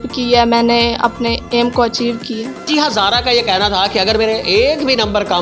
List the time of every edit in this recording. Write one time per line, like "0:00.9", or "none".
0:02.7